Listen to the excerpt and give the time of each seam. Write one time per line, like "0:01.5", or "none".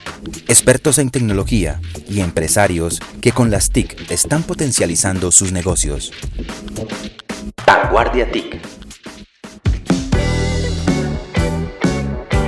0:09.6